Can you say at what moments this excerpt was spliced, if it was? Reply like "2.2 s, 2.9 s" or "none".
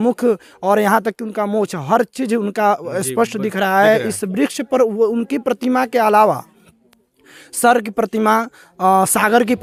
none